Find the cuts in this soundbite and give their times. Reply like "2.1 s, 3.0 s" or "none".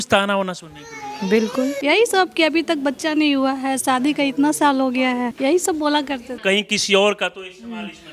1.8 s, 5.3 s, 6.4 s